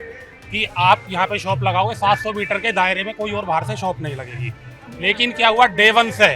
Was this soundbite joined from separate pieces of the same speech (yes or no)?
no